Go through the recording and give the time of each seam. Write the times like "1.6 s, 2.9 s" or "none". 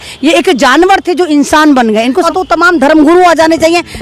2.3 s

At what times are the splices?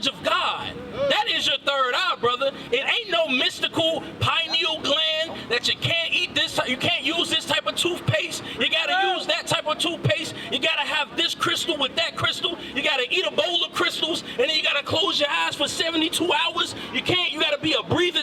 none

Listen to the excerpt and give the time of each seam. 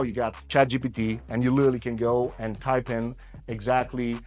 none

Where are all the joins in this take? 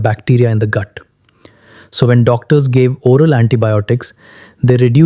none

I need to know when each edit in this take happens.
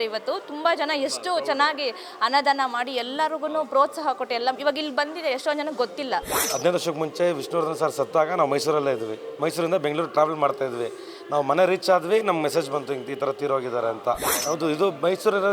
6.4 s, 14.3 s

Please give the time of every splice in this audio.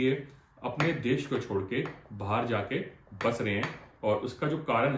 none

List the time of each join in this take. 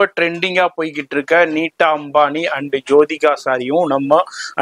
none

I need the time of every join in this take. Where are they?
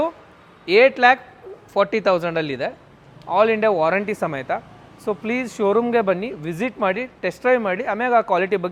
none

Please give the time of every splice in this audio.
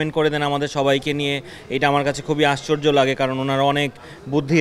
none

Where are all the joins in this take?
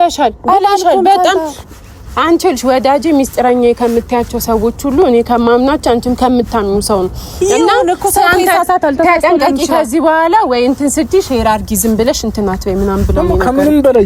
none

